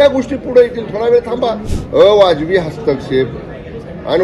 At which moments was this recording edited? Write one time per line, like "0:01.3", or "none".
0:01.7